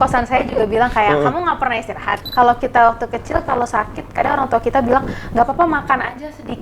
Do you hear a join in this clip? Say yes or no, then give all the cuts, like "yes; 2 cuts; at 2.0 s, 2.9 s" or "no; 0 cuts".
yes; 1 cut; at 2.2 s